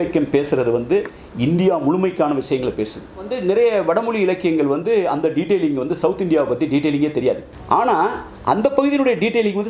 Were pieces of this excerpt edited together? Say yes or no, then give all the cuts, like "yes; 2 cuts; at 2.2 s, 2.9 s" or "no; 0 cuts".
yes; 2 cuts; at 3.3 s, 7.5 s